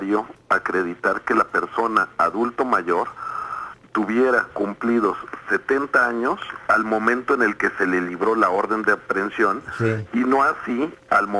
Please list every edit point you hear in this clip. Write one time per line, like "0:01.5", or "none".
none